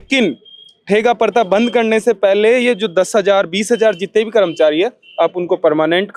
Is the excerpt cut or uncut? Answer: uncut